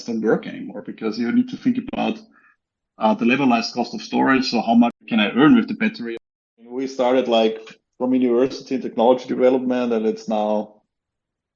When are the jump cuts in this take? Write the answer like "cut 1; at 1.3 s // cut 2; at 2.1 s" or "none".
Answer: cut 1; at 5.0 s // cut 2; at 6.0 s